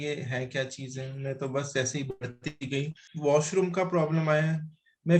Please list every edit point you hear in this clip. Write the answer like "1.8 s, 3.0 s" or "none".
3.0 s